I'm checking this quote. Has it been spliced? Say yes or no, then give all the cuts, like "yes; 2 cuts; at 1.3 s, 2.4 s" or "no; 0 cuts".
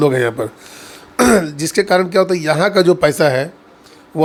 no; 0 cuts